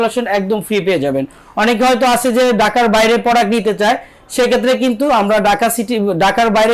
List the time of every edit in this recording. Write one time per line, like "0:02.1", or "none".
none